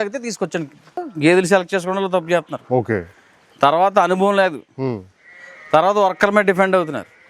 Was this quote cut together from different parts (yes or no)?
yes